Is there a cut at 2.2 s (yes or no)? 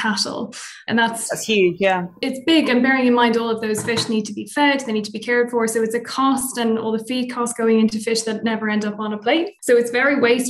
yes